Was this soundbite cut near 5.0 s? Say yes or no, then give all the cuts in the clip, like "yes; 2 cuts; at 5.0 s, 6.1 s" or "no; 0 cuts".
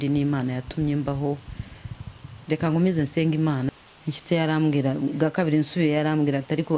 no; 1 cut; at 3.7 s